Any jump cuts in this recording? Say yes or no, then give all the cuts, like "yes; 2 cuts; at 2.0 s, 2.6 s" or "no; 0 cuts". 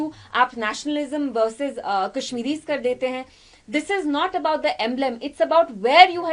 no; 0 cuts